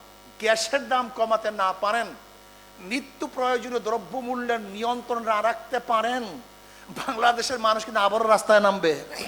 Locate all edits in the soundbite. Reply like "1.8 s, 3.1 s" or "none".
none